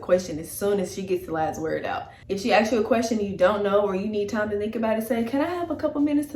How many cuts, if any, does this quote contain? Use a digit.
1